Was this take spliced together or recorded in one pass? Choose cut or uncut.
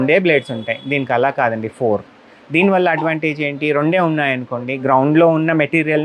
uncut